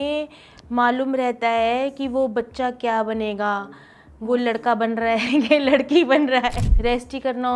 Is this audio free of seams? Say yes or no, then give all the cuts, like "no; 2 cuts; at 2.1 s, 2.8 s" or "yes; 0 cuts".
no; 1 cut; at 6.7 s